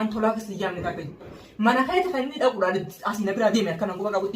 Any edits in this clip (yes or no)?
yes